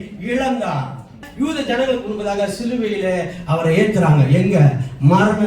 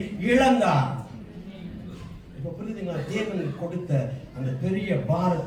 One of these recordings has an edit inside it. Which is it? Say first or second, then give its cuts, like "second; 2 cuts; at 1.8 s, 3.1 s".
first; 1 cut; at 1.2 s